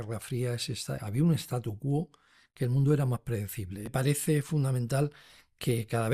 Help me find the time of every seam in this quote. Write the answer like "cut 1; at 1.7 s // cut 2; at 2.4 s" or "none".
cut 1; at 3.9 s